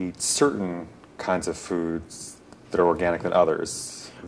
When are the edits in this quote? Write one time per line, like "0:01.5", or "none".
none